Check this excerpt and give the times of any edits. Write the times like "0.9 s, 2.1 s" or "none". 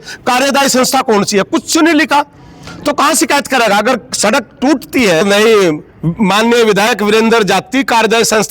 5.2 s